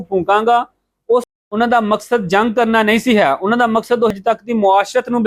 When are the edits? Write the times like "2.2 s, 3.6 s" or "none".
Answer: 1.3 s, 4.1 s

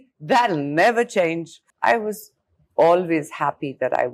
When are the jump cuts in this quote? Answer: 1.7 s

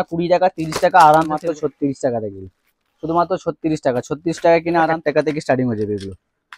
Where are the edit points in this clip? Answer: 1.4 s, 5.0 s

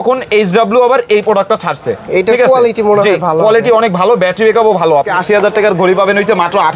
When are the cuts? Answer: 5.1 s

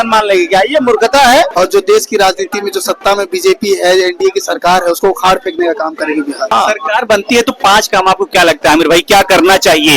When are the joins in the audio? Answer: 1.5 s, 6.5 s

